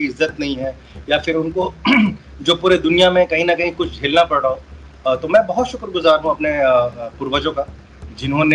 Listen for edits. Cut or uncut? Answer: uncut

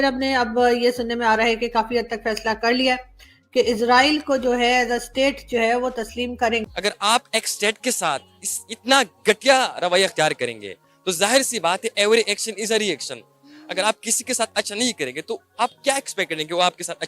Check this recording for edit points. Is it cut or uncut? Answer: cut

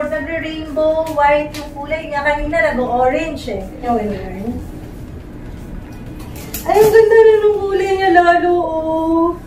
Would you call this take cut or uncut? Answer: uncut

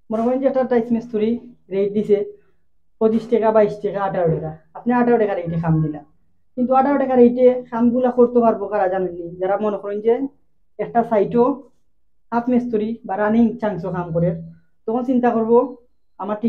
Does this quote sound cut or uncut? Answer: uncut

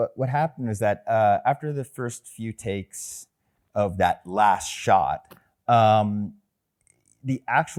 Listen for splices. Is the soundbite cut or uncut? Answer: uncut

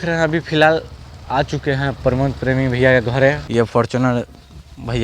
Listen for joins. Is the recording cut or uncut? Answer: cut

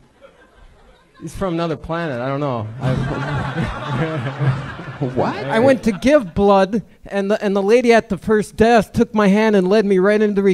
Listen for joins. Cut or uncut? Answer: cut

